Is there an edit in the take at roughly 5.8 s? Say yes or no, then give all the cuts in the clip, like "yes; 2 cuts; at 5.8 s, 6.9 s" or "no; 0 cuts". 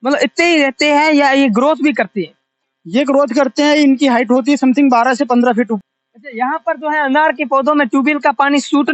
yes; 1 cut; at 5.8 s